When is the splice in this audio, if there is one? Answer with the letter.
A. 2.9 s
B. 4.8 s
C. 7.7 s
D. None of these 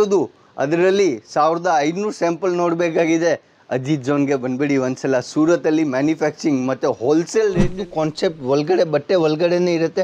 C